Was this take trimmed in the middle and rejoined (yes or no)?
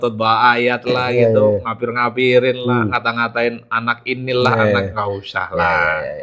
no